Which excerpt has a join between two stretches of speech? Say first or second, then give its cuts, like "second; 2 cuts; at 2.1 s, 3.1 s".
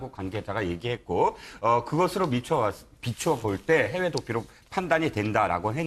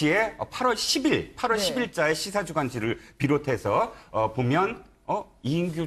second; 1 cut; at 2.3 s